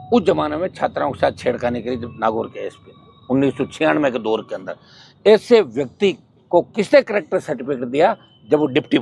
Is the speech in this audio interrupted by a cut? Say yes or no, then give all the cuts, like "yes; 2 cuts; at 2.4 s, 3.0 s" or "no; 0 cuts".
no; 0 cuts